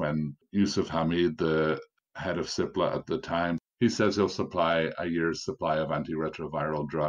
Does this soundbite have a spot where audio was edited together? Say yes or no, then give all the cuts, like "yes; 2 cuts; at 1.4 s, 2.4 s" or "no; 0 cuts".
yes; 1 cut; at 3.6 s